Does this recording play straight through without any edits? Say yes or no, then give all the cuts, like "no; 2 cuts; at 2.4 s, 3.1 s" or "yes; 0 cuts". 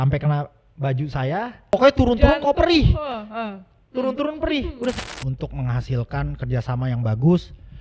no; 2 cuts; at 1.7 s, 5.0 s